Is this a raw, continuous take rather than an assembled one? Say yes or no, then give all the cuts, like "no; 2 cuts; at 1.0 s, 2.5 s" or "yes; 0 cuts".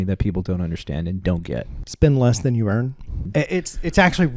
no; 2 cuts; at 1.8 s, 3.3 s